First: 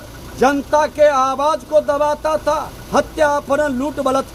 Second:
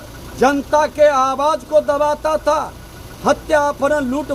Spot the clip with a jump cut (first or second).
first